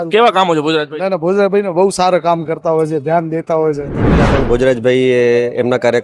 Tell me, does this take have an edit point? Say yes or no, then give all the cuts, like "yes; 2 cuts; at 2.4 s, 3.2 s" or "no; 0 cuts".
yes; 1 cut; at 4.3 s